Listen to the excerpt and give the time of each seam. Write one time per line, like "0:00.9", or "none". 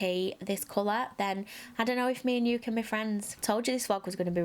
0:03.3